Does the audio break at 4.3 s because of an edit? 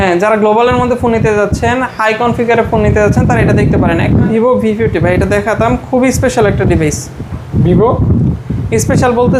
yes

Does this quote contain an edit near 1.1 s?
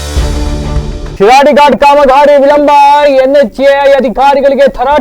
yes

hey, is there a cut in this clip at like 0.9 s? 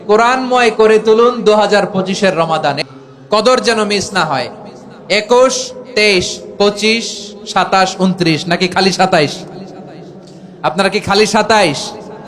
no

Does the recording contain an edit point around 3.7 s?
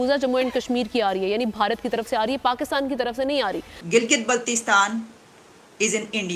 yes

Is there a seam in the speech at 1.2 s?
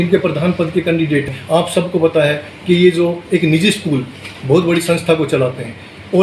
yes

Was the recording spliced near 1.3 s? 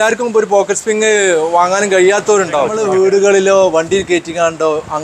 no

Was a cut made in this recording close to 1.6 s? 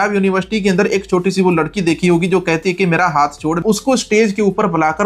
no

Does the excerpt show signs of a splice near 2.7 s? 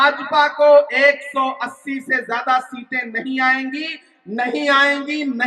no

